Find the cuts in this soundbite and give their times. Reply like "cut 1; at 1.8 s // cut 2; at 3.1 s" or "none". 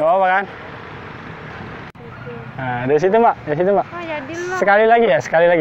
cut 1; at 1.9 s